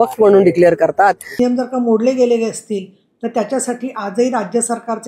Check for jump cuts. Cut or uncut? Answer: cut